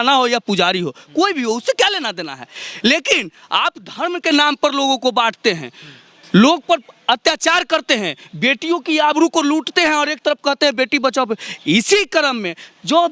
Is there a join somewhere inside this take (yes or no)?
no